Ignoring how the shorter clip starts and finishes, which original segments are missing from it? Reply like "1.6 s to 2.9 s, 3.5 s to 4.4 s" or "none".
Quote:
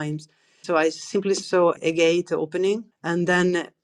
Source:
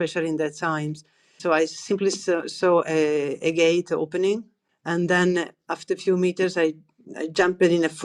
2.4 s to 3.3 s, 4.5 s to 4.7 s